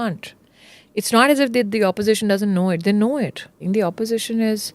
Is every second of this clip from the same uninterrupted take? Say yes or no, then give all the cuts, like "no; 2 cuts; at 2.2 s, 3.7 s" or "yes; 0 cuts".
no; 1 cut; at 3.6 s